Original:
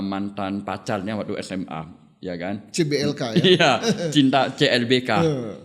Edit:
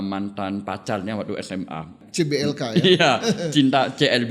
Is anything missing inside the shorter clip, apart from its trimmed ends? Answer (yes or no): yes